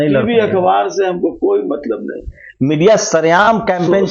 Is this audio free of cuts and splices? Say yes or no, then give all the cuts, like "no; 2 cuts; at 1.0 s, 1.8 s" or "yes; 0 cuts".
no; 1 cut; at 2.4 s